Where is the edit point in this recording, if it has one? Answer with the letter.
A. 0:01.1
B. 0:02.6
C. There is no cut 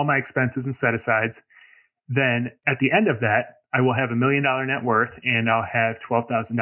B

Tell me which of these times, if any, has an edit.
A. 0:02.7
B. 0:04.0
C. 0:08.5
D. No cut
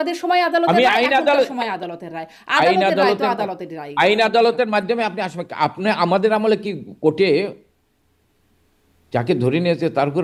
D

